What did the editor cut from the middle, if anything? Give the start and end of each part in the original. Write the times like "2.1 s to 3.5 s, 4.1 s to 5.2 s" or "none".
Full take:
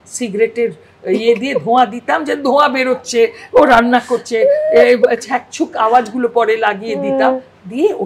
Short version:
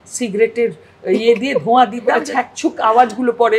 2.2 s to 5.2 s